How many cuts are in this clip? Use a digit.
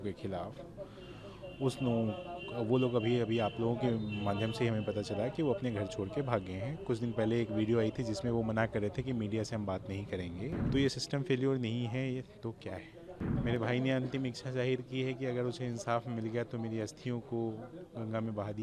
2